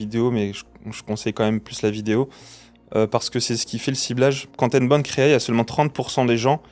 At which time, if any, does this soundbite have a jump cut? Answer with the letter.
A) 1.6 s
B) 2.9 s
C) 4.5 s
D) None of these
C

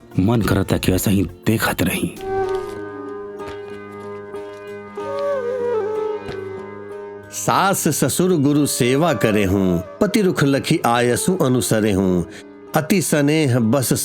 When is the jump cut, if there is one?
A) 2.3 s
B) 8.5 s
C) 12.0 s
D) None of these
A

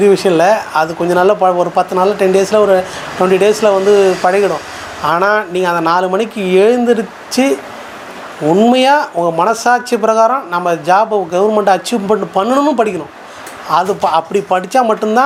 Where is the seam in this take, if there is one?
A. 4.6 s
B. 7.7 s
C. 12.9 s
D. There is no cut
D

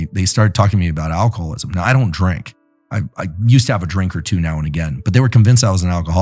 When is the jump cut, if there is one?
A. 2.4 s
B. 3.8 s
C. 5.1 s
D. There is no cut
D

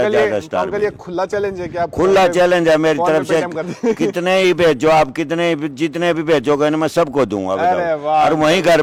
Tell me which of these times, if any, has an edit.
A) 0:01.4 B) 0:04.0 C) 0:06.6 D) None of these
D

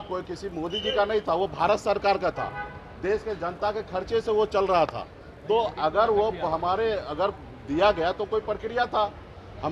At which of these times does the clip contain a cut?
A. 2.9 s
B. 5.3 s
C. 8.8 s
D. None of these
D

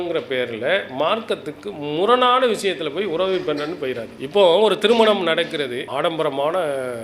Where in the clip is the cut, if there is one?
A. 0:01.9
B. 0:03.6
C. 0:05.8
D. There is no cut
C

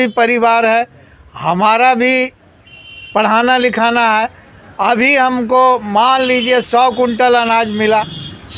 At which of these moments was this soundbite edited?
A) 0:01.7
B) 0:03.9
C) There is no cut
C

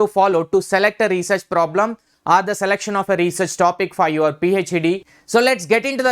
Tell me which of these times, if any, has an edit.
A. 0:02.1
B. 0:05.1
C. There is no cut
B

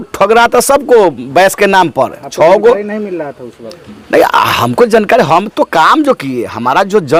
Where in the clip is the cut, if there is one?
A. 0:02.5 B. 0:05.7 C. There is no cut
C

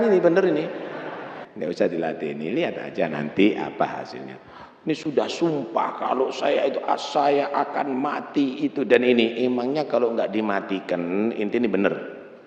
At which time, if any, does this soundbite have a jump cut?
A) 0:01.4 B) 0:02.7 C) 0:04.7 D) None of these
A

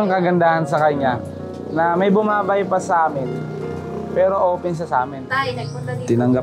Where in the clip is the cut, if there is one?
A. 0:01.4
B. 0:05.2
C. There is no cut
B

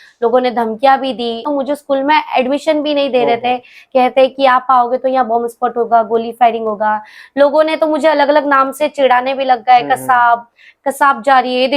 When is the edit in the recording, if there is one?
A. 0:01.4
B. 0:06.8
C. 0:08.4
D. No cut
A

